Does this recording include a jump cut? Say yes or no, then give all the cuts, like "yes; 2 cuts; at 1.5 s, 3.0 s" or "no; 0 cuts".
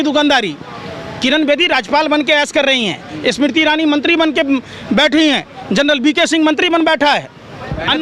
no; 0 cuts